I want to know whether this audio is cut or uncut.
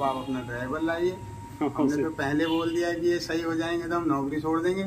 uncut